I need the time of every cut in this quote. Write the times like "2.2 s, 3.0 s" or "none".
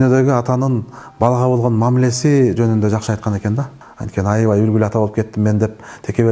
3.8 s